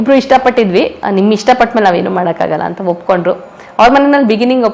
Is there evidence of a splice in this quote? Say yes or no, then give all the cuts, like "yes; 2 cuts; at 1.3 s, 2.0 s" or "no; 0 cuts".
yes; 1 cut; at 1.0 s